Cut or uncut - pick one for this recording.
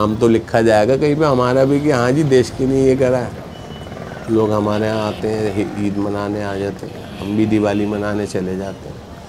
uncut